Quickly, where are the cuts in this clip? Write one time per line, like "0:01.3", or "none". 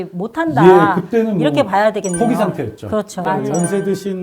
0:03.1